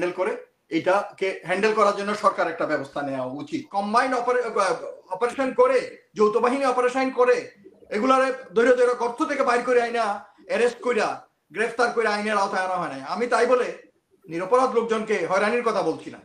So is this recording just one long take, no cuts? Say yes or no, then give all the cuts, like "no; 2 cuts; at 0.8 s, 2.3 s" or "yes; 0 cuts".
no; 1 cut; at 3.7 s